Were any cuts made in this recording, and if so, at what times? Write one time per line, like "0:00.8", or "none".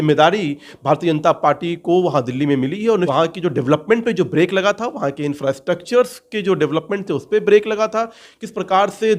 0:03.1